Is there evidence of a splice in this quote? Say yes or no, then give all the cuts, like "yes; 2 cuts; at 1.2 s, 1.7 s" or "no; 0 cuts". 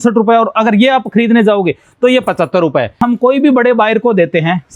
yes; 1 cut; at 3.0 s